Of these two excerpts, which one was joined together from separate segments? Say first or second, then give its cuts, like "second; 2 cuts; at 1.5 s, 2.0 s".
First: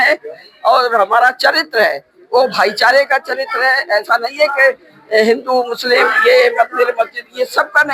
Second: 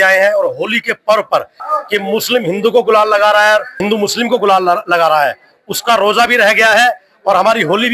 second; 2 cuts; at 1.6 s, 3.7 s